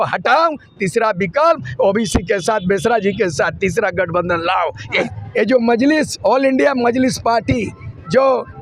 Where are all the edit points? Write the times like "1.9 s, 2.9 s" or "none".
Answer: 5.1 s